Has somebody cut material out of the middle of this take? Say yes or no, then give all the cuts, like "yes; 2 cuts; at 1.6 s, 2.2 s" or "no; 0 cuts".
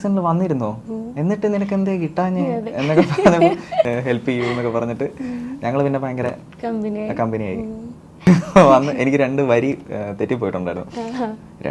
yes; 2 cuts; at 3.9 s, 8.2 s